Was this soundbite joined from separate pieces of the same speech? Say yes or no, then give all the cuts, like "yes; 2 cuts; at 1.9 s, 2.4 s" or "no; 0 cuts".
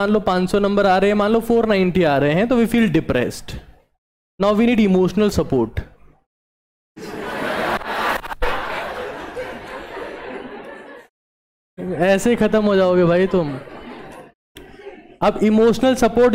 no; 0 cuts